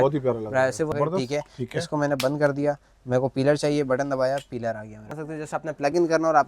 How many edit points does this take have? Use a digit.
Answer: 2